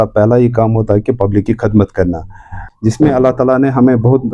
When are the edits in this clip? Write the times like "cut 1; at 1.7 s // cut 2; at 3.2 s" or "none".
cut 1; at 2.7 s